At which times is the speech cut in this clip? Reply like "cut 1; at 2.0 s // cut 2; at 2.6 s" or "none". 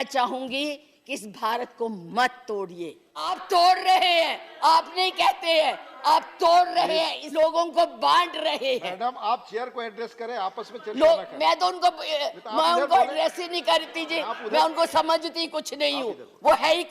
cut 1; at 3.4 s // cut 2; at 7.2 s